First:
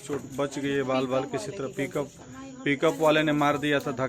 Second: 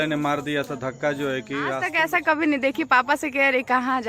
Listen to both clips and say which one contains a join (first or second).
second